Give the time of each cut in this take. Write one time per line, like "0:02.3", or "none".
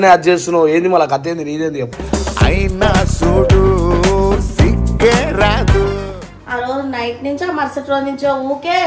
0:06.2